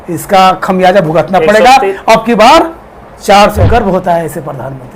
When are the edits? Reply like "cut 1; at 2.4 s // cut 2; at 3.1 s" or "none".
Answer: cut 1; at 3.7 s